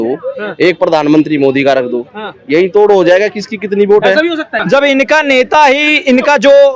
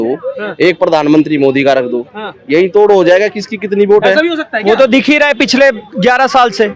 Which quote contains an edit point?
first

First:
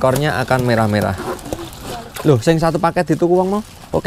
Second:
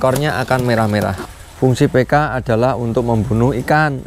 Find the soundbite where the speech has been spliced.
second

